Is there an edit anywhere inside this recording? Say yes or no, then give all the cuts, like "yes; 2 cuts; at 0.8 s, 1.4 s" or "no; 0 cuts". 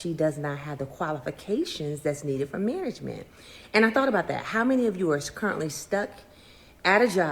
yes; 1 cut; at 1.8 s